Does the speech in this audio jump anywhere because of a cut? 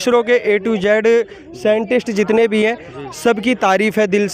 no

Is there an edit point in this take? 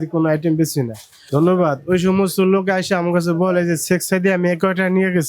yes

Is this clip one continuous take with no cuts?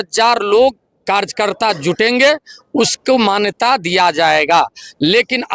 yes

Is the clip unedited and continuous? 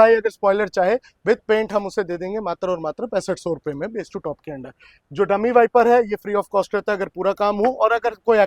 yes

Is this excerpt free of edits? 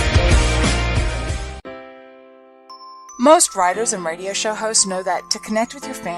no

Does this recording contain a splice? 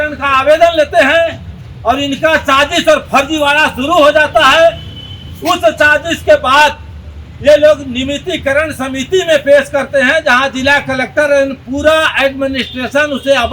no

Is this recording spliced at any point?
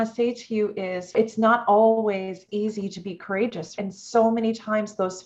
yes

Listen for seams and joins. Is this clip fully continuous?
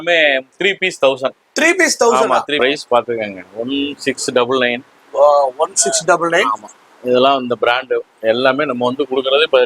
no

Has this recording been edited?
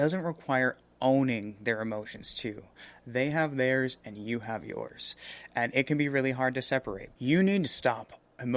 yes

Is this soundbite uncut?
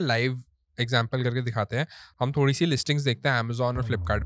yes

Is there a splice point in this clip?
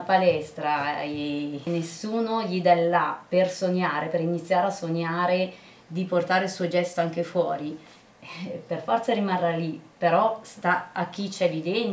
yes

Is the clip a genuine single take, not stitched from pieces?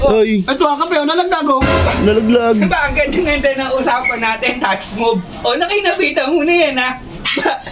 yes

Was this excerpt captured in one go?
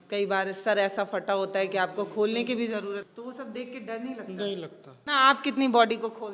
no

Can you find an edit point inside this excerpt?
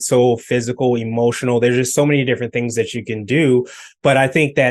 no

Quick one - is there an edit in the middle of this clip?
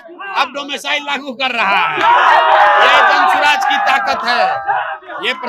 no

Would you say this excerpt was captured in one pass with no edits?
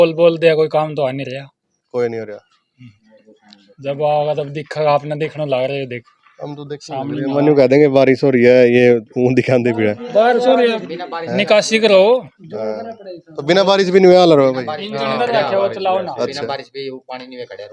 yes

